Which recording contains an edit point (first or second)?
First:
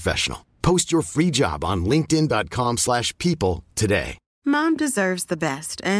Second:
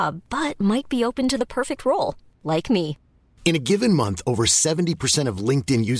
first